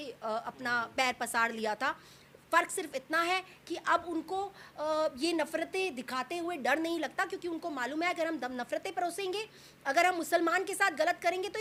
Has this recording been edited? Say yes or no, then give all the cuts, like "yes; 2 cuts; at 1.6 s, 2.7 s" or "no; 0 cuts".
no; 0 cuts